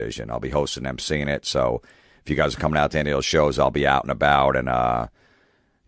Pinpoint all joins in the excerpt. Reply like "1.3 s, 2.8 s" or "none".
1.9 s

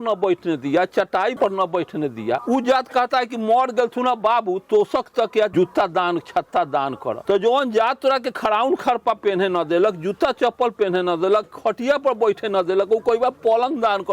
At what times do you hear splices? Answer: 1.3 s, 2.4 s, 5.5 s, 7.2 s

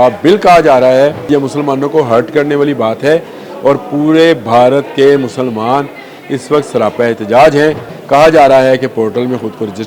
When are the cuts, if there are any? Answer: 1.3 s, 7.9 s

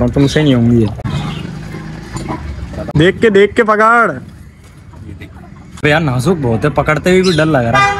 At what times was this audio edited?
1.0 s, 5.8 s

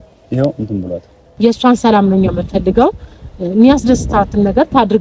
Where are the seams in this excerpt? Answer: 1.2 s

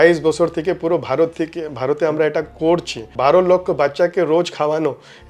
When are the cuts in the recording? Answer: 3.1 s

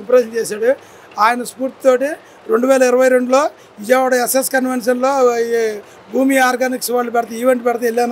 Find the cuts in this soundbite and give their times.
none

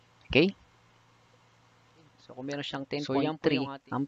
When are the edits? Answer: 2.2 s

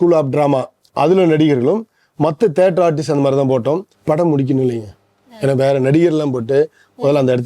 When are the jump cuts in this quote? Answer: 3.9 s

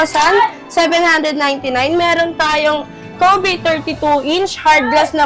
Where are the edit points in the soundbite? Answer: none

